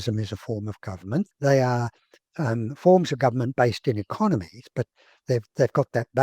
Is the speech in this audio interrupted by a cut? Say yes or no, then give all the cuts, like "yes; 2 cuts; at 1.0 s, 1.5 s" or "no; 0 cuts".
yes; 1 cut; at 1.3 s